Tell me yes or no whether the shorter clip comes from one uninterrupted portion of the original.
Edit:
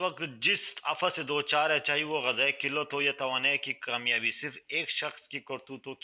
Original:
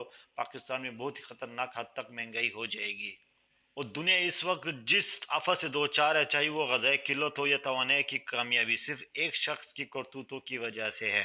yes